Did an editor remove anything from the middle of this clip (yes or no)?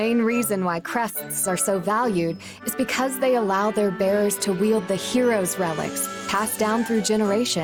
no